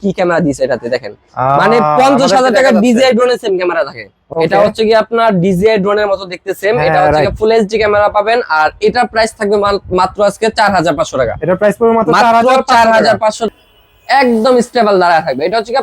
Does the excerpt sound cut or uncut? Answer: cut